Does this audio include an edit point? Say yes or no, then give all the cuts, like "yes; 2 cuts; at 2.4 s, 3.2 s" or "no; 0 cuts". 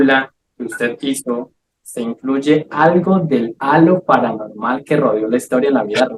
no; 0 cuts